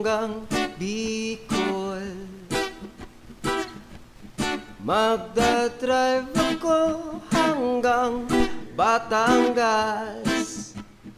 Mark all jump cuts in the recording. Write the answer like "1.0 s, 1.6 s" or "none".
none